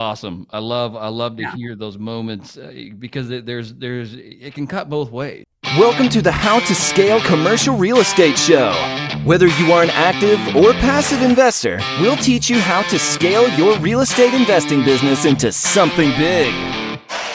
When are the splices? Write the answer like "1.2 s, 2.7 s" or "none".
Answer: 5.4 s

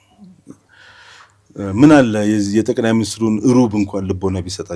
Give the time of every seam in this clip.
none

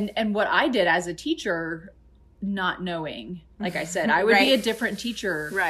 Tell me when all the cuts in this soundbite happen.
none

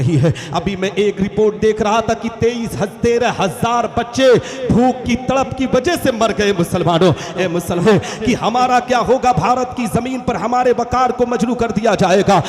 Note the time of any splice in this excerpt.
7.8 s

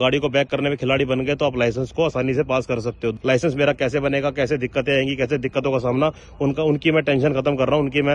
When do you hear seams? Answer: none

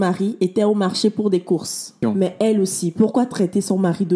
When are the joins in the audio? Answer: 1.9 s

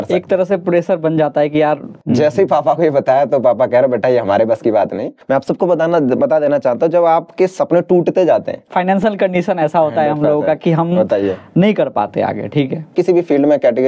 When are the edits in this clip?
1.9 s, 5.1 s, 8.6 s, 12.9 s

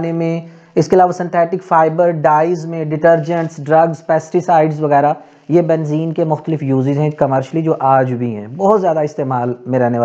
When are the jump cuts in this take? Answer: none

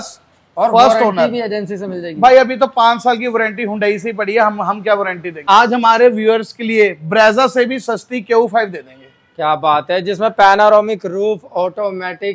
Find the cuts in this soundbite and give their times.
5.3 s

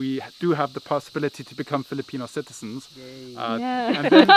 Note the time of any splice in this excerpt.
none

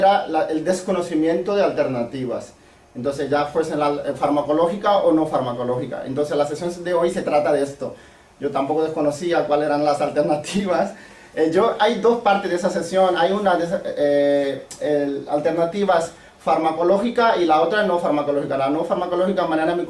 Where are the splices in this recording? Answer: 12.6 s

